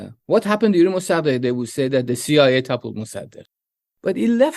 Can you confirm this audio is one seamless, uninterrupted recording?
no; 1 cut; at 3.6 s

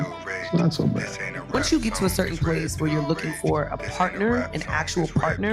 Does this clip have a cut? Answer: yes; 1 cut; at 1.5 s

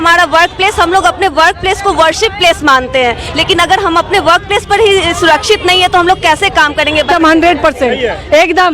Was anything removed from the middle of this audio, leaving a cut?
yes; 1 cut; at 7.1 s

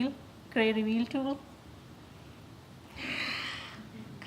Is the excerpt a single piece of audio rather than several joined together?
no; 1 cut; at 1.5 s

